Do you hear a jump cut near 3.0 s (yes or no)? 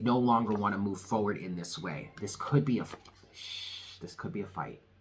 no